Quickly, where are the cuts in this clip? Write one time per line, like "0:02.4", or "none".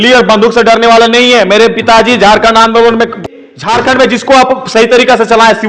0:03.3